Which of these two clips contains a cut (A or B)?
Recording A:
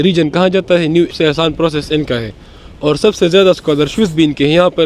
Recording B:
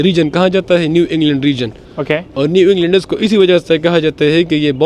A